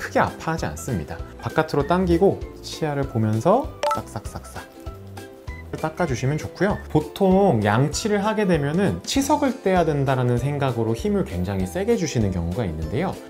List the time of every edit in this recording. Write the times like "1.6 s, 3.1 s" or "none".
6.8 s